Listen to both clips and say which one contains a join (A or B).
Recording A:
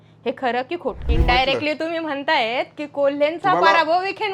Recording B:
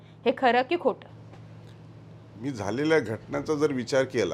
A